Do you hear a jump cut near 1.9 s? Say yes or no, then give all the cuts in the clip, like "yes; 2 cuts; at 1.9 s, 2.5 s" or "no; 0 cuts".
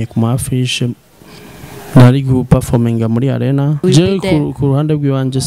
no; 1 cut; at 3.8 s